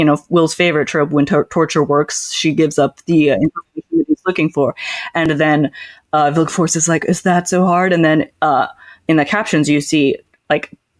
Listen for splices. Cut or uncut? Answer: uncut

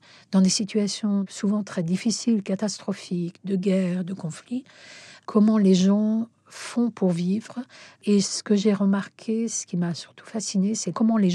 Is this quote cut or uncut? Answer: uncut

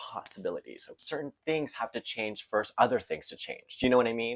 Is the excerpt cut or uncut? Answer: cut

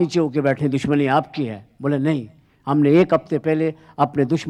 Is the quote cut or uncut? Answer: uncut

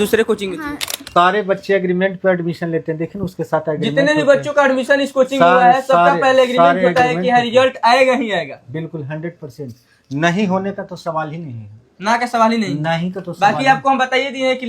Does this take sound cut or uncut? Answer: cut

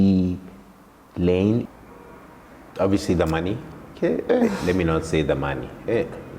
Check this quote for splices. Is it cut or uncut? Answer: cut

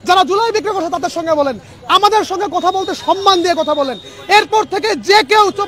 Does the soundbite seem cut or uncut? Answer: uncut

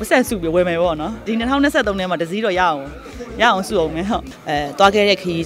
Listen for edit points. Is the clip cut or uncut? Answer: cut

